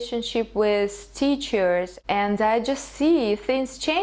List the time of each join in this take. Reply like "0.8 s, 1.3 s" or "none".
1.9 s